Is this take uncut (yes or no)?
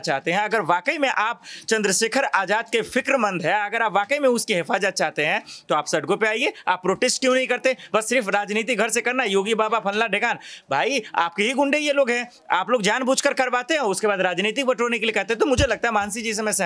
yes